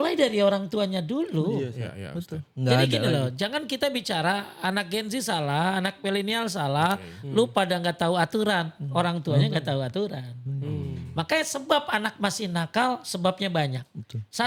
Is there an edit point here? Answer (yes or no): no